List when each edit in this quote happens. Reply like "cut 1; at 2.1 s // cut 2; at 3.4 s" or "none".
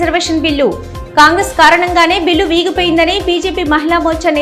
none

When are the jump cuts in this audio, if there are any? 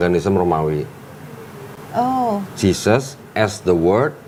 none

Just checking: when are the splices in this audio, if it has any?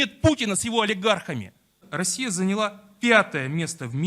cut 1; at 1.8 s

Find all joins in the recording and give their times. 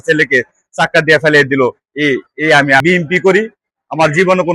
cut 1; at 2.8 s

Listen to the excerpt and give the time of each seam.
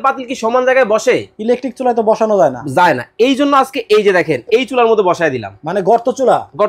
none

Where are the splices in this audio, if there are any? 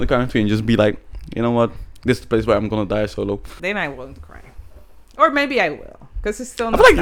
cut 1; at 3.5 s

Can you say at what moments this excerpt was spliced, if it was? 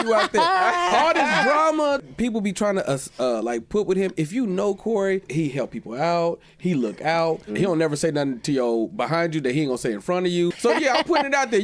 cut 1; at 2.0 s // cut 2; at 5.3 s // cut 3; at 7.5 s // cut 4; at 10.6 s

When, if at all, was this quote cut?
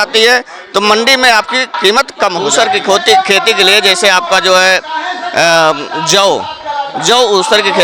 cut 1; at 2.4 s

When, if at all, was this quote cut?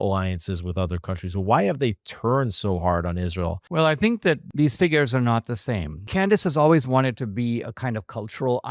cut 1; at 3.6 s // cut 2; at 4.5 s // cut 3; at 5.9 s

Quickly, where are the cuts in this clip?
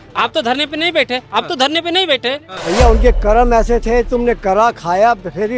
cut 1; at 2.5 s

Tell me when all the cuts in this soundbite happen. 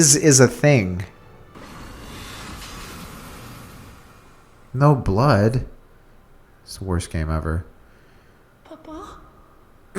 cut 1; at 1.5 s

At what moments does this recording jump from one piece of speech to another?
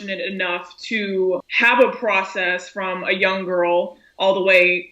cut 1; at 1.5 s

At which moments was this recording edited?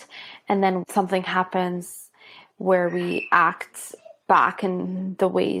none

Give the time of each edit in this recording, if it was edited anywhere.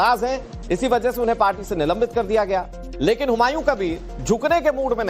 cut 1; at 1.4 s

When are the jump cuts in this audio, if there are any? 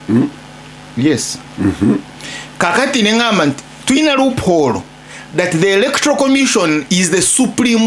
cut 1; at 1.4 s

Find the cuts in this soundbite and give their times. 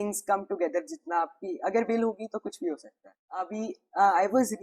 cut 1; at 3.5 s

